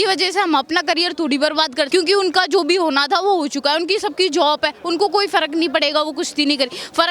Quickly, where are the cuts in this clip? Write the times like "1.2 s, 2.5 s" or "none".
1.9 s